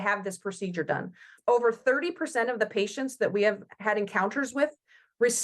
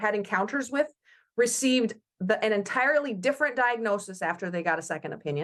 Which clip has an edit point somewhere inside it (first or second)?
first